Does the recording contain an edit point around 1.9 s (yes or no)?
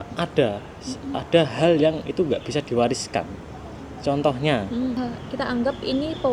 no